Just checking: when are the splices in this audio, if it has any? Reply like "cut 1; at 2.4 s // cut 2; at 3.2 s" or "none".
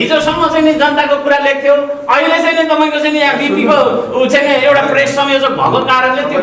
none